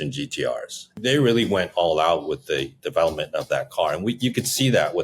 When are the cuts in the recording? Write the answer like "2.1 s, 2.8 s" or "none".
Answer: 0.9 s